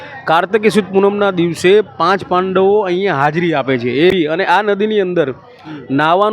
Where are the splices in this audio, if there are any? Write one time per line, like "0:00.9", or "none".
0:04.1

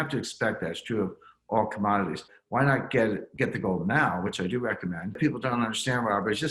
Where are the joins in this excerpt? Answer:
0:02.3
0:05.2

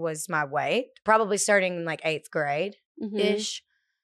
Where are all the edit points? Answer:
0:01.0

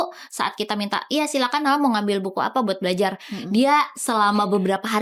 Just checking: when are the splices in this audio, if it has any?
none

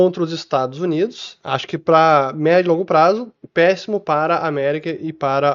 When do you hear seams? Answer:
0:01.3

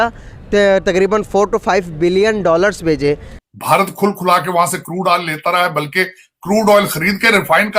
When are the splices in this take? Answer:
0:03.3

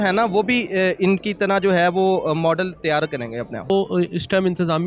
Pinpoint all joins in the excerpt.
0:03.7

